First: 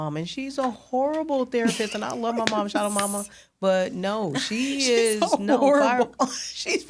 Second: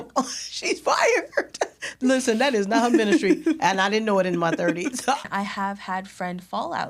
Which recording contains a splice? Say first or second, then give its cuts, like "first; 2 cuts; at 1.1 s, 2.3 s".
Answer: second; 2 cuts; at 1.9 s, 5.2 s